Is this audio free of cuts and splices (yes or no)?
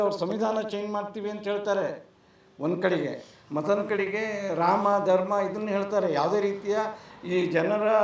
yes